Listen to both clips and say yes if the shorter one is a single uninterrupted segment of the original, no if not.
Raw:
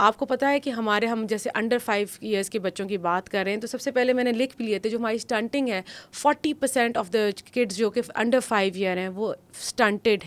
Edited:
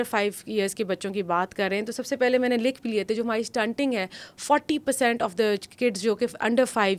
yes